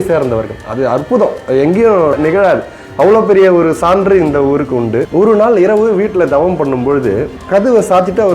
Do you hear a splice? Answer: yes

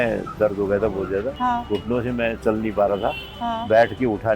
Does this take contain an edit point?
yes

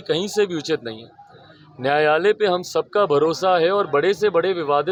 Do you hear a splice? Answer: no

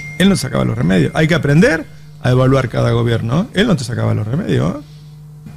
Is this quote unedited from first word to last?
yes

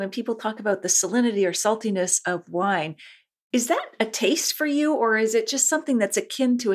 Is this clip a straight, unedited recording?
yes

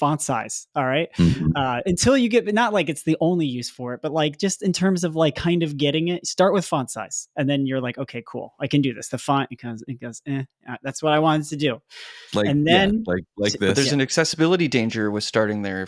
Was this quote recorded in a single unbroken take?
yes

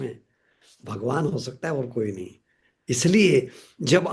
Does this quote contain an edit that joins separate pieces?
no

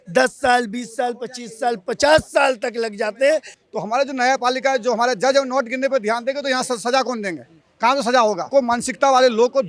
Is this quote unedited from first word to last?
no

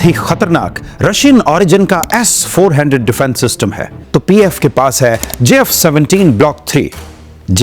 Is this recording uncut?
no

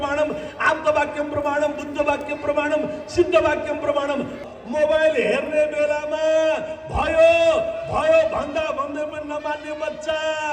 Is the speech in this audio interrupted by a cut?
yes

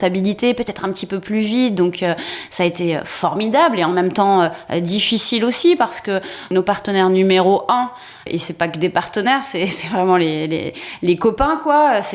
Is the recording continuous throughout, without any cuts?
no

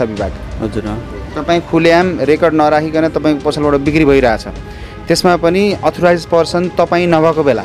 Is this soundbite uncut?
yes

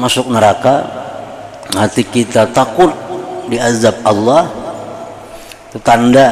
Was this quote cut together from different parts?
no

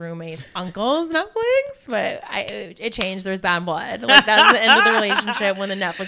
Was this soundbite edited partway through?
no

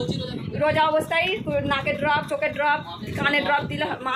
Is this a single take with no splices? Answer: yes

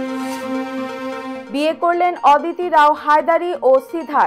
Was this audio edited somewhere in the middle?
no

